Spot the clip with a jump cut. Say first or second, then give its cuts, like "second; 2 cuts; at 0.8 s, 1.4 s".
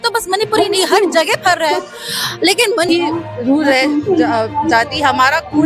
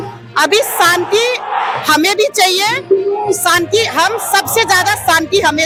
first; 1 cut; at 2.9 s